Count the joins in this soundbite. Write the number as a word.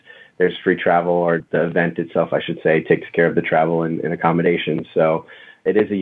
zero